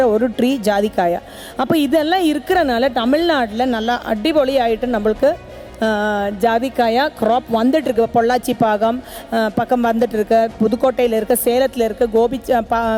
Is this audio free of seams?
yes; 0 cuts

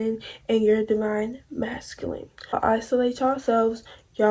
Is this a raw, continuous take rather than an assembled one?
no; 1 cut; at 2.6 s

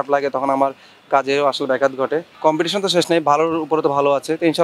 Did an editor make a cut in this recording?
yes; 1 cut; at 2.3 s

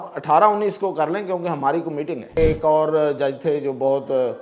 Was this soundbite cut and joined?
yes; 1 cut; at 2.4 s

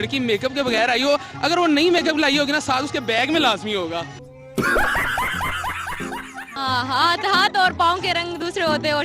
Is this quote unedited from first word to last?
no; 1 cut; at 6.5 s

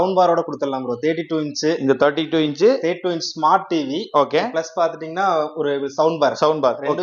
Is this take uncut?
yes; 0 cuts

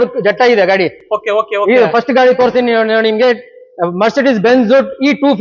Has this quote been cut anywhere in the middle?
no; 0 cuts

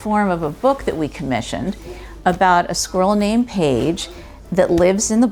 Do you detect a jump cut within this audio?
no; 0 cuts

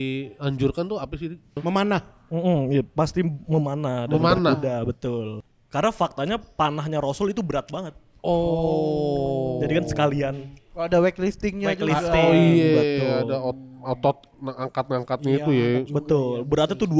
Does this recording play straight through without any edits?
no; 2 cuts; at 1.6 s, 5.4 s

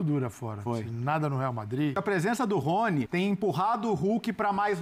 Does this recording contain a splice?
yes; 2 cuts; at 2.0 s, 3.1 s

